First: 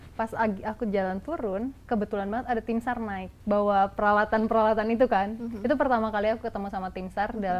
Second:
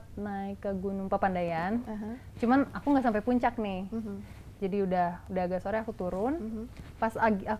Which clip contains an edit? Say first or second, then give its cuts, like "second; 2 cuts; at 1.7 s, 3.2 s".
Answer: first; 2 cuts; at 1.8 s, 3.3 s